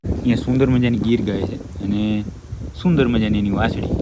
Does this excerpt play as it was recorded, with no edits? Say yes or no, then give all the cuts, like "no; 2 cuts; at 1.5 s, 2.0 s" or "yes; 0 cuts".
yes; 0 cuts